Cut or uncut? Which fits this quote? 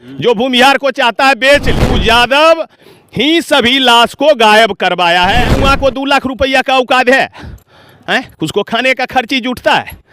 cut